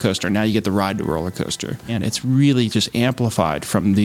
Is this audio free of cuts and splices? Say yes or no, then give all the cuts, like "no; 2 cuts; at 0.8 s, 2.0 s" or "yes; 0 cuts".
no; 1 cut; at 1.9 s